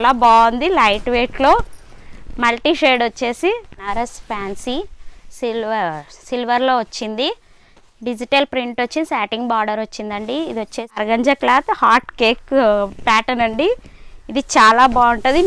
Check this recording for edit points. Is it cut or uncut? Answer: cut